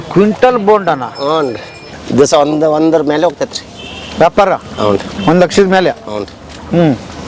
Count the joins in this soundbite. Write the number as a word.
one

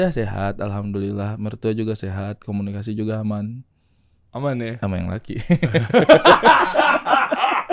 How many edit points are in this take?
zero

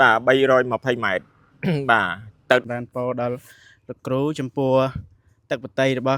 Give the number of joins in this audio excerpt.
one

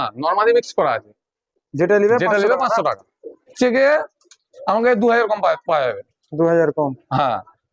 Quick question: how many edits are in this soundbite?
one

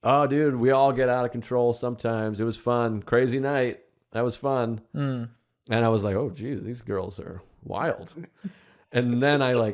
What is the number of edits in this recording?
zero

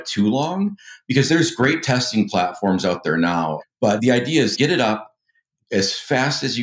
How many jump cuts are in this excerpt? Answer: two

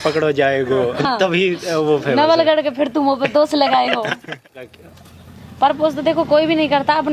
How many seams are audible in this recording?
two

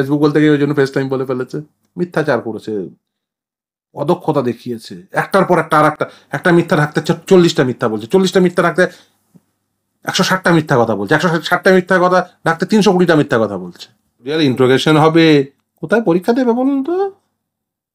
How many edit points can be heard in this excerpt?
two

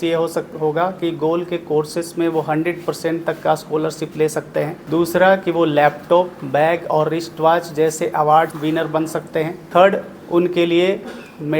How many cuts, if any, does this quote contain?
three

